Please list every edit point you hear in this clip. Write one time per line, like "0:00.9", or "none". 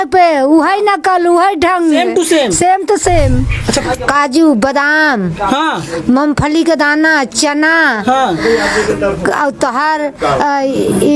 0:03.8

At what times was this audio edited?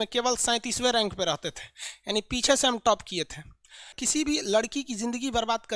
0:04.0

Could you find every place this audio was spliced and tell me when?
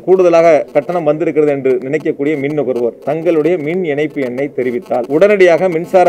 0:05.1

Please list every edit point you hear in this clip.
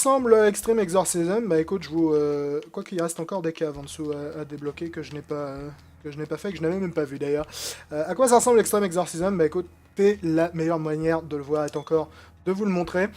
0:07.1

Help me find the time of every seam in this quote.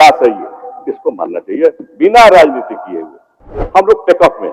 0:03.5

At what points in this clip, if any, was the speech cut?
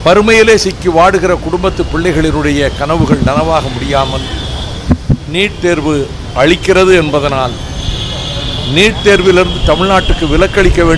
none

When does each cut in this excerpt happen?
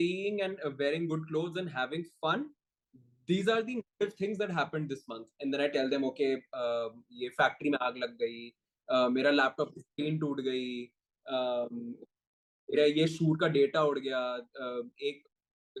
none

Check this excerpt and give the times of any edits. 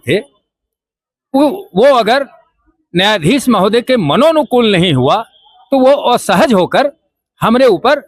none

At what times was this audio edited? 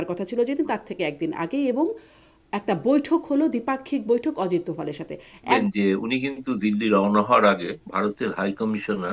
0:05.5

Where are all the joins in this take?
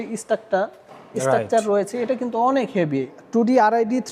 0:03.1

